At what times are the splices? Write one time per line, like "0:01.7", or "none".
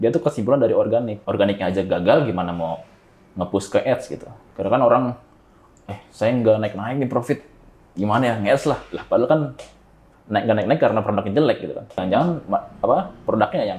0:01.2
0:04.4
0:11.9